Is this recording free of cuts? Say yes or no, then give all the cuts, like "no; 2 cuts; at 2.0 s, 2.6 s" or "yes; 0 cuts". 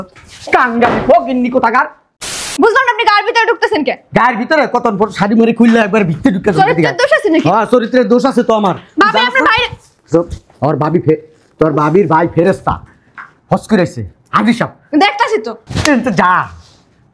no; 1 cut; at 2.4 s